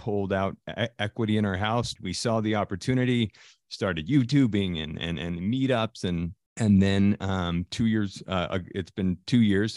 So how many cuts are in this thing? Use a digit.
2